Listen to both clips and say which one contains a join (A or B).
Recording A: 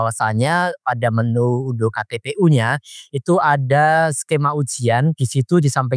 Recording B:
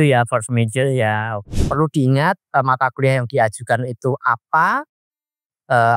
B